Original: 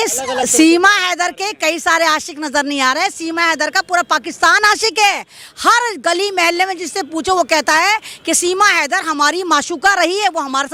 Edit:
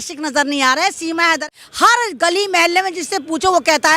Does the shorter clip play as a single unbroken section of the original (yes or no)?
no